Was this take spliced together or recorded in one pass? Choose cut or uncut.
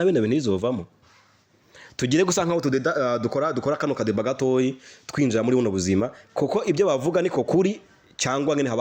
uncut